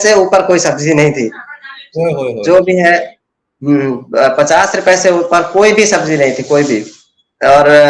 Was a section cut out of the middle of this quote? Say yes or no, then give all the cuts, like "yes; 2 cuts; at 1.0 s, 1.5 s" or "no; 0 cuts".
no; 0 cuts